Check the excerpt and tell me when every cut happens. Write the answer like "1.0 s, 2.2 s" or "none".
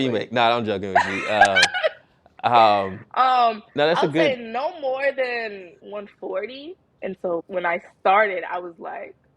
5.7 s, 7.1 s